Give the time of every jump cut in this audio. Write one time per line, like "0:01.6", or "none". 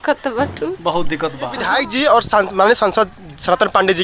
0:01.6